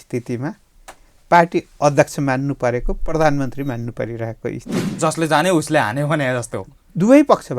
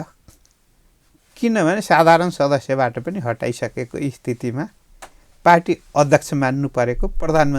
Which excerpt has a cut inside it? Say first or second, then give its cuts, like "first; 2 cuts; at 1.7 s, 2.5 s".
first; 1 cut; at 4.9 s